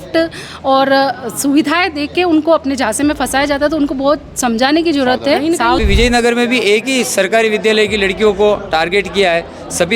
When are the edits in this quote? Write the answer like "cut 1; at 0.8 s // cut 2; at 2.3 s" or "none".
cut 1; at 5.8 s